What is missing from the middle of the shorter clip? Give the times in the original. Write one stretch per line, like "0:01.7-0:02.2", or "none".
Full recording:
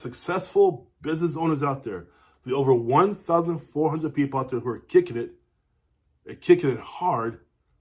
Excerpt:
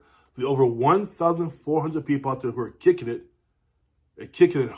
none

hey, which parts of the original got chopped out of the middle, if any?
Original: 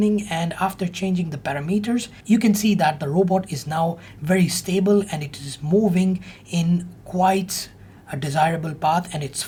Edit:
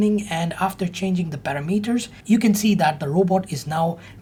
none

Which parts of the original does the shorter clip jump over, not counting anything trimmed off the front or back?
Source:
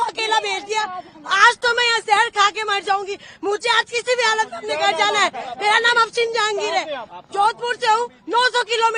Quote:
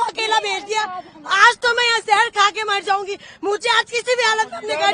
none

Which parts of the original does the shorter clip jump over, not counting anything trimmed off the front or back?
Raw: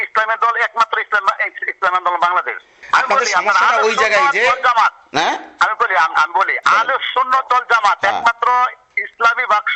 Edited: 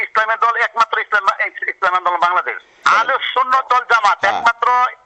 0:02.8-0:06.6

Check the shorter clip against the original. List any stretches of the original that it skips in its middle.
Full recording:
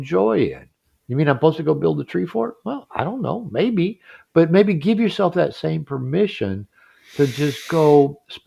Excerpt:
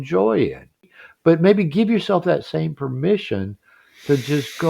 0:01.0-0:04.1

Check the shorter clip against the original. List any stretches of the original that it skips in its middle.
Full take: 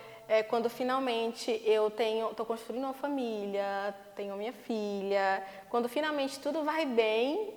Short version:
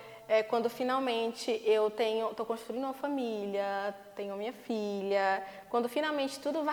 none

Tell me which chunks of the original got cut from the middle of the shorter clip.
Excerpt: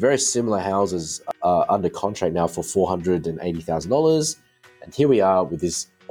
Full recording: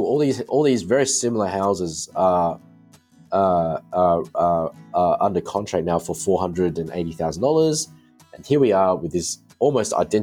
0:02.1-0:04.7

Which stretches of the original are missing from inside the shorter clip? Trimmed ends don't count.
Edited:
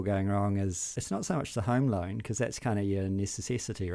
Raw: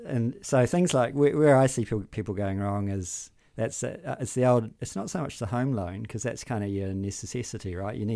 0:03.3-0:04.8

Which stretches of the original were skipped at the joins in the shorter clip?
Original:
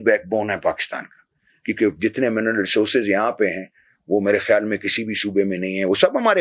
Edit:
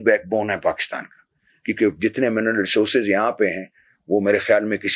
none

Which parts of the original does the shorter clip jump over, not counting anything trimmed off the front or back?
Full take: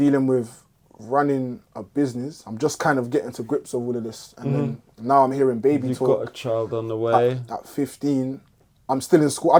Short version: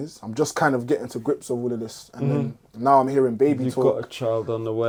none

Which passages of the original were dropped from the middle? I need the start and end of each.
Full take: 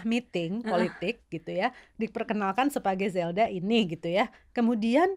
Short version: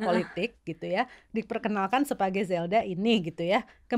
none

